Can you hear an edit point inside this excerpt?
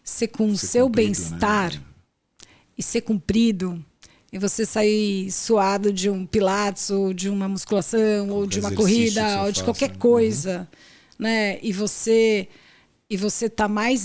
no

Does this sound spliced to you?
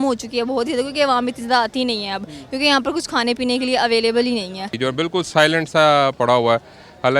yes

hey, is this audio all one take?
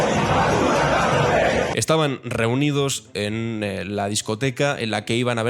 no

